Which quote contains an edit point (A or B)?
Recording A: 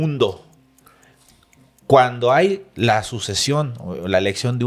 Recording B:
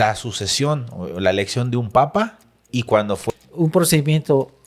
B